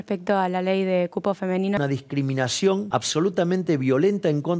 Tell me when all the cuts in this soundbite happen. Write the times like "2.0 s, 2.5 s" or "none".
1.8 s, 2.9 s